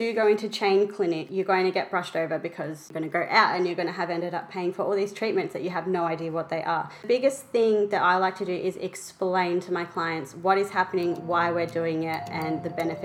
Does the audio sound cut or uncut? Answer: cut